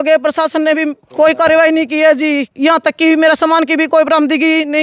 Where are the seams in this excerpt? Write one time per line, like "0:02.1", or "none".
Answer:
0:01.0
0:02.5